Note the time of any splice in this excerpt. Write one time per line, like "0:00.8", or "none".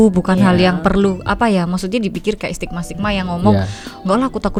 none